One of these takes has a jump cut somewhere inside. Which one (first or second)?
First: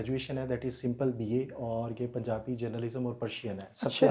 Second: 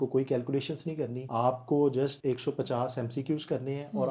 second